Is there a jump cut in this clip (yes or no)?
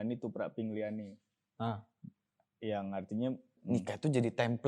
yes